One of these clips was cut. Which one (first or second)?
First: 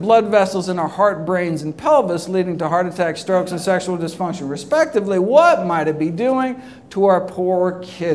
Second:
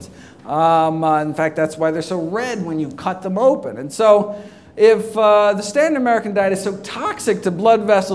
first